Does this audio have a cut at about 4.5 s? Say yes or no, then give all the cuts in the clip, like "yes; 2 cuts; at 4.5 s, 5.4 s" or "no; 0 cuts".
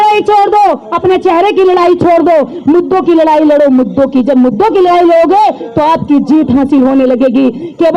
no; 0 cuts